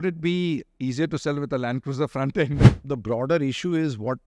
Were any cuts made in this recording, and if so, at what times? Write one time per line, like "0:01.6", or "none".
0:02.6